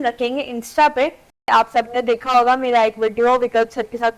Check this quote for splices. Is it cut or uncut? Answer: cut